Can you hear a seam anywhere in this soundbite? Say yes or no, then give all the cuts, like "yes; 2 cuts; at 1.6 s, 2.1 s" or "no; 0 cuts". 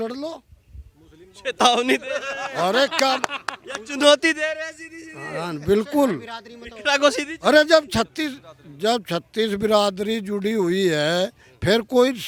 no; 0 cuts